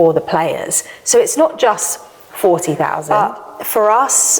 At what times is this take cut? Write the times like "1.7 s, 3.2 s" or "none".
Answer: 3.0 s